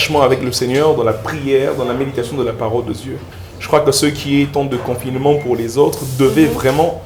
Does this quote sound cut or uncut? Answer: uncut